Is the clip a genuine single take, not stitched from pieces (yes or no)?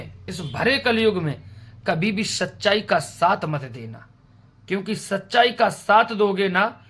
yes